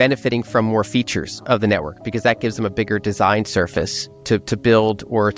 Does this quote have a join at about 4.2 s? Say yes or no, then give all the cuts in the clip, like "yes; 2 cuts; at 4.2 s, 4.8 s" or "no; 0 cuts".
yes; 1 cut; at 4.2 s